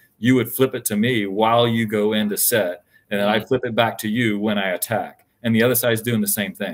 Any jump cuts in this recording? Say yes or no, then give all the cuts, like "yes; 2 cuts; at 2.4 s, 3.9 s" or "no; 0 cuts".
no; 0 cuts